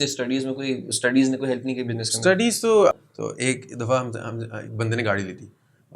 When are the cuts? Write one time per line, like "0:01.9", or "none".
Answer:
0:02.9